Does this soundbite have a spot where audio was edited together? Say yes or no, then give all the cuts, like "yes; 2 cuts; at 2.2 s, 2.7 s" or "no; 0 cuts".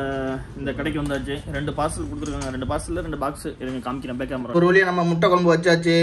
yes; 1 cut; at 4.5 s